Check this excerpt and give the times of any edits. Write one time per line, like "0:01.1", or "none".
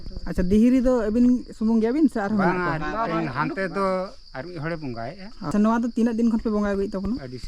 0:05.5